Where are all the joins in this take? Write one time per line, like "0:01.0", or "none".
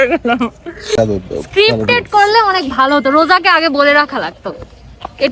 0:00.9